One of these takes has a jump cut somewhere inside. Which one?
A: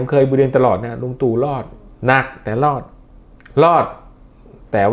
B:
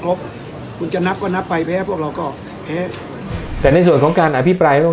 B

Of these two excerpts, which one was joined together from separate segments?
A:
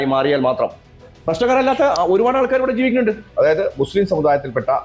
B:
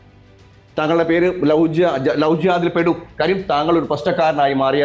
A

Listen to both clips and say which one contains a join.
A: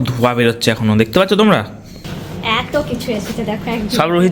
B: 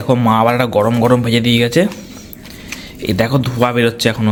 A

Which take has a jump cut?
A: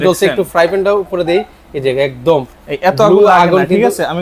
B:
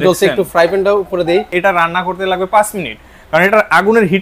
B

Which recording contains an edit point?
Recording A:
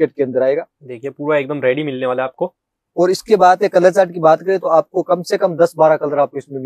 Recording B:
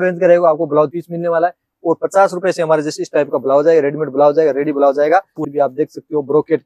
B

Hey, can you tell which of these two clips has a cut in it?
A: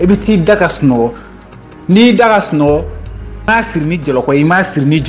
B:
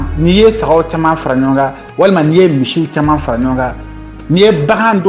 A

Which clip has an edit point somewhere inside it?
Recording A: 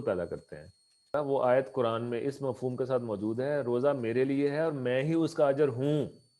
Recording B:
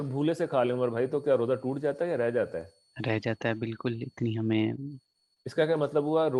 A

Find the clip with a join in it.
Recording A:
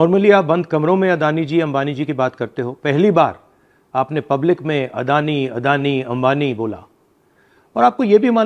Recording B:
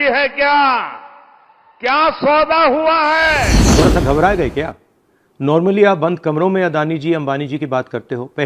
B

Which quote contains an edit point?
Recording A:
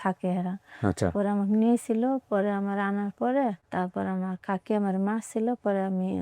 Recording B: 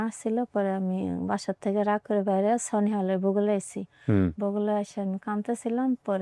A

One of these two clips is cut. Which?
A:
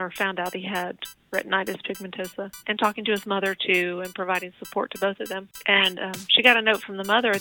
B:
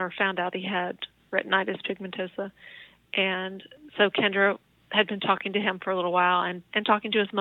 A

